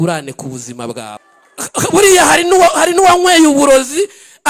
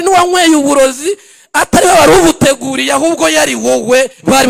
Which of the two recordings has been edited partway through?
first; 1 cut; at 1.3 s

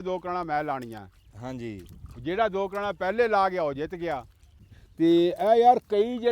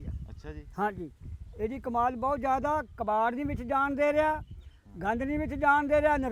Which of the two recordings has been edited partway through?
first; 1 cut; at 4.5 s

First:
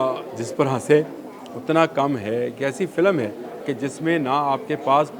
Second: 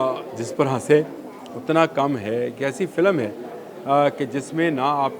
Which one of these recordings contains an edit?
first; 1 cut; at 3.7 s

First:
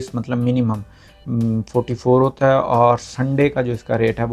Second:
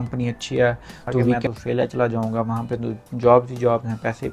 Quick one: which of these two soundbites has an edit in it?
second; 1 cut; at 1.4 s

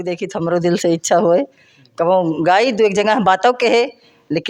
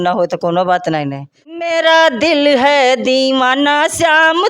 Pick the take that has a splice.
second; 1 cut; at 1.2 s

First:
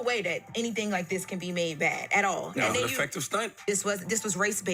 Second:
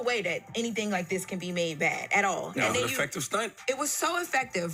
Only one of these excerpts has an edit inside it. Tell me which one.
first; 1 cut; at 3.5 s

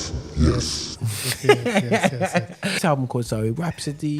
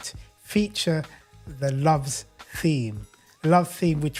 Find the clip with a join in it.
first; 1 cut; at 2.8 s

